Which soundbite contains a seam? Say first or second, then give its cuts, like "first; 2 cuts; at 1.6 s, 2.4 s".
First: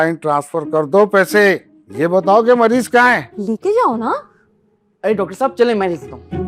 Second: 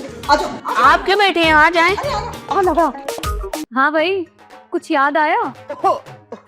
second; 1 cut; at 3.6 s